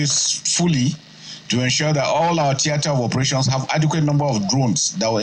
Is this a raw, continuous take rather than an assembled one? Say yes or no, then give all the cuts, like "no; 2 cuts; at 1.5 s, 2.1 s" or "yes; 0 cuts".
yes; 0 cuts